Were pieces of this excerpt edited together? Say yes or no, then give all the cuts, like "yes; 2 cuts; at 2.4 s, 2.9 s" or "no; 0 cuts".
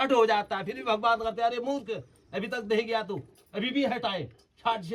no; 0 cuts